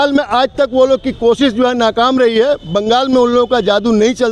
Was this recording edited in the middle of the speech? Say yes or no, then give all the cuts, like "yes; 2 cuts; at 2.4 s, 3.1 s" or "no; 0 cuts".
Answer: no; 0 cuts